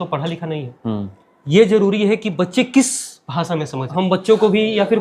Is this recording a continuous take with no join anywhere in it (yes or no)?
no